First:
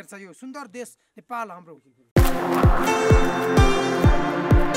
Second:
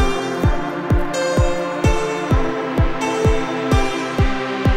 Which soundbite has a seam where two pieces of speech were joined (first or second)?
first